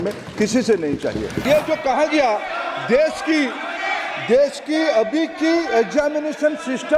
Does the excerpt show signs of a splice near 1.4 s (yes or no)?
yes